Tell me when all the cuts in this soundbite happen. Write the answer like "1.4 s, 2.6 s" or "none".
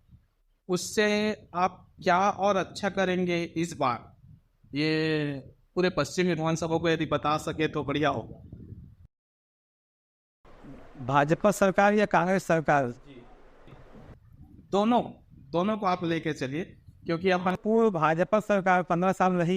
none